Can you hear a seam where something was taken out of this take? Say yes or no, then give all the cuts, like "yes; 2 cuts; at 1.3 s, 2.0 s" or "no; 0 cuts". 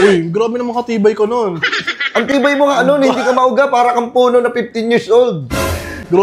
no; 0 cuts